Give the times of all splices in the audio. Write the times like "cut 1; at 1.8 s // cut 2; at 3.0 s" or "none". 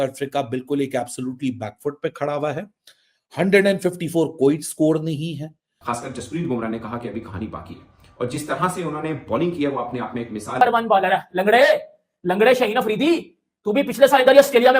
cut 1; at 5.7 s // cut 2; at 10.6 s